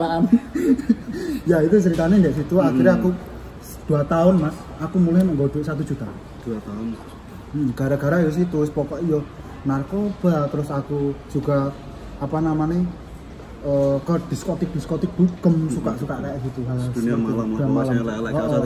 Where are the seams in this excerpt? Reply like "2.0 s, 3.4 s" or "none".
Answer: none